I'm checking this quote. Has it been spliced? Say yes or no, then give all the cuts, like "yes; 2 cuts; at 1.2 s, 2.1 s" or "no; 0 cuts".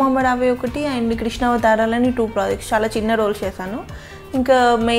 no; 0 cuts